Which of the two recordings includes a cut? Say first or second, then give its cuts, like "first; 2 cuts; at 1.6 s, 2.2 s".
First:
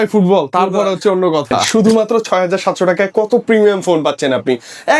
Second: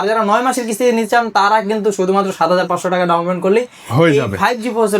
first; 1 cut; at 1.6 s